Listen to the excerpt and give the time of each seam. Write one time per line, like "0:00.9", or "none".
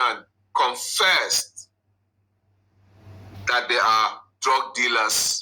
none

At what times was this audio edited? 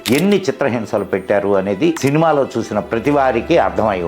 0:02.0

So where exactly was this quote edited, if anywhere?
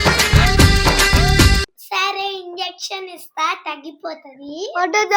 0:01.8

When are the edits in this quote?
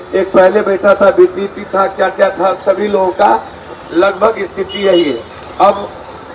none

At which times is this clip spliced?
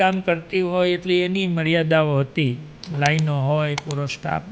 none

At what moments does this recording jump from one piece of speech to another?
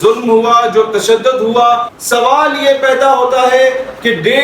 0:01.9

